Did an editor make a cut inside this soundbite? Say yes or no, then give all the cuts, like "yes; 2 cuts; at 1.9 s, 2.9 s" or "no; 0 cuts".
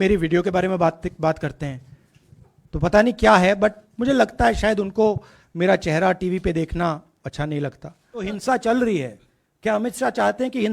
yes; 1 cut; at 8.3 s